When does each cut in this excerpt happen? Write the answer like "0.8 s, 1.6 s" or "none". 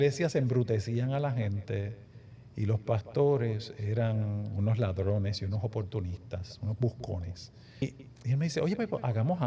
7.8 s